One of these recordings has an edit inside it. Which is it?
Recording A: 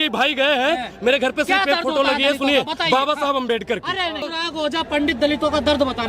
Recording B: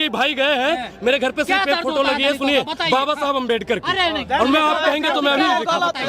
A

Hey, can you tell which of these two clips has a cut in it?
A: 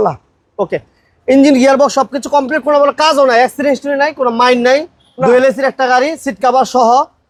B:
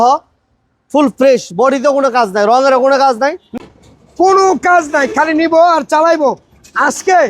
B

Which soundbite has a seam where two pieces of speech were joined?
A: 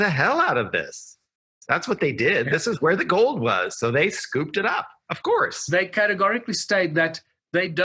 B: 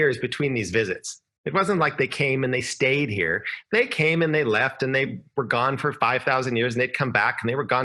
A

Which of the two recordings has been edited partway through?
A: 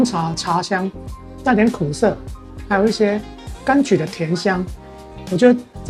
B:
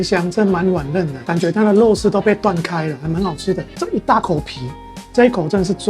B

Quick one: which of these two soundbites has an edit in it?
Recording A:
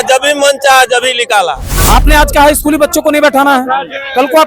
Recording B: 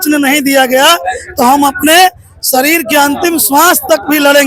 A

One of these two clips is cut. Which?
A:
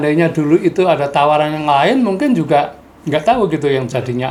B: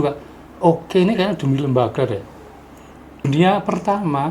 B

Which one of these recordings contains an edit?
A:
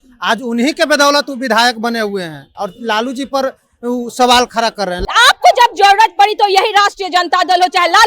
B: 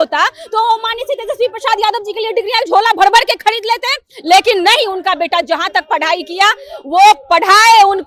A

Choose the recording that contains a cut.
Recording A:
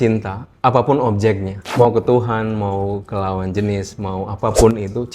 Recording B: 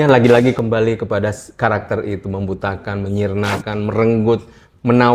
A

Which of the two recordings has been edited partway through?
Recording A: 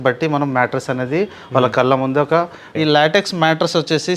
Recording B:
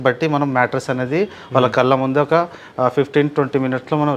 A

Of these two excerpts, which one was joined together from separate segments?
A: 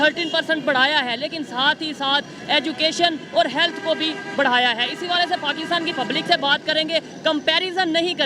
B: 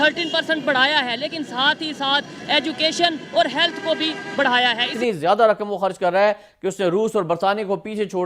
B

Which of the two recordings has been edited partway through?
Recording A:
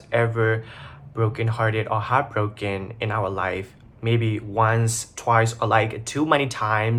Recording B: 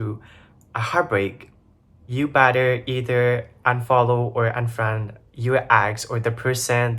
B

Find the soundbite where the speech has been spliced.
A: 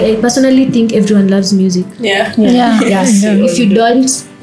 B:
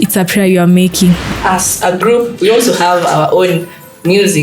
B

